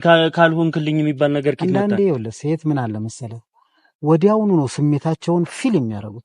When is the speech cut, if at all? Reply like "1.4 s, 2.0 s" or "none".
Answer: none